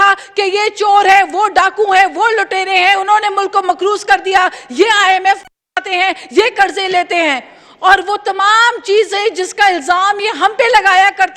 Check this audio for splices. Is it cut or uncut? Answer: uncut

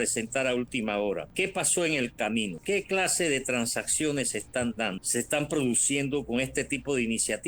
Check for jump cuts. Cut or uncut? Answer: cut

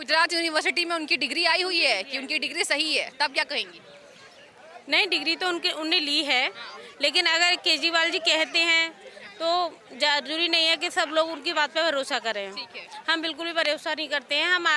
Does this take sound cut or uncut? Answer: uncut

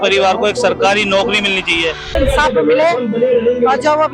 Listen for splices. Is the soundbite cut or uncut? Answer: cut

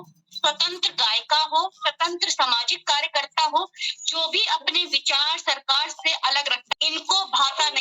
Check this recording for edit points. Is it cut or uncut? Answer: cut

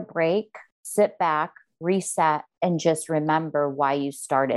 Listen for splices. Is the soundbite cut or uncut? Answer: cut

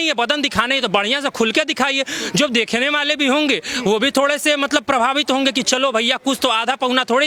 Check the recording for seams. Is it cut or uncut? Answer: uncut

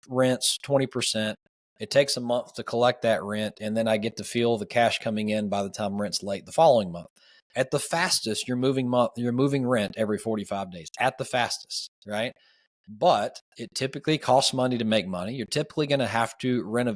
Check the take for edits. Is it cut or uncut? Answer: uncut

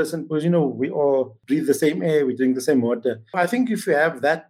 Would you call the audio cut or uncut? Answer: cut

